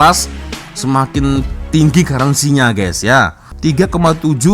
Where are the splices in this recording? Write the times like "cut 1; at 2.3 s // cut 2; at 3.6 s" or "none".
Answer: cut 1; at 3.4 s